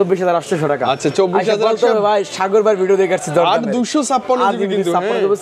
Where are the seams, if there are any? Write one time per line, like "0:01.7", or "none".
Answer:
none